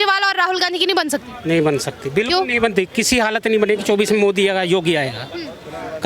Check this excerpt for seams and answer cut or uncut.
uncut